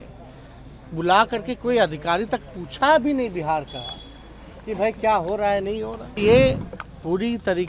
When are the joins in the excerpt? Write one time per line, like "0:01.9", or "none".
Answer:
0:06.2